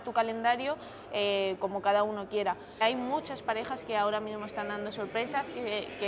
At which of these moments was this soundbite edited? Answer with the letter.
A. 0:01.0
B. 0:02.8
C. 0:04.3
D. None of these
B